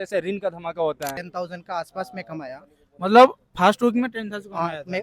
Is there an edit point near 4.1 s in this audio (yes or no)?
no